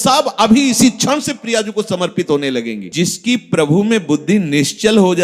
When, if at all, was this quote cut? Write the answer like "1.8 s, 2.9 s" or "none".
2.9 s